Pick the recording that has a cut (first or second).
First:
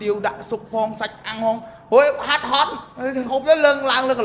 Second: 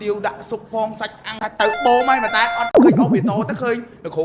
second